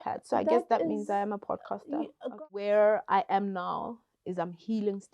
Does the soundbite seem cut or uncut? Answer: cut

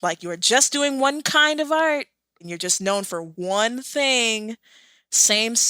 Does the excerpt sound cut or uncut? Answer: cut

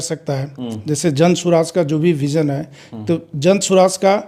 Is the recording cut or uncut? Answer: uncut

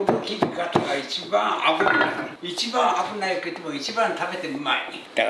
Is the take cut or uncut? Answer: uncut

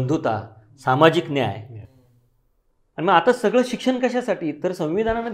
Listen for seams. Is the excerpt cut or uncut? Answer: uncut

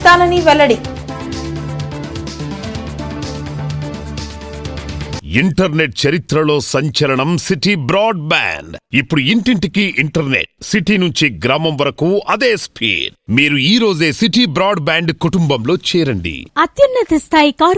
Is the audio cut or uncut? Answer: cut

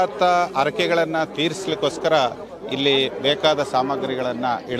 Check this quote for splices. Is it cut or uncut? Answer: uncut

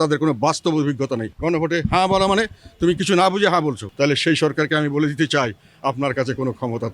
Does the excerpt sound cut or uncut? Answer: cut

